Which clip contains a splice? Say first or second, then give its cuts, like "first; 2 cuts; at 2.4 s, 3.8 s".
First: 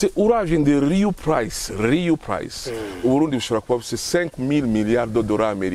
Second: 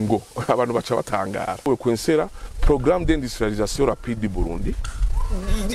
second; 1 cut; at 1.7 s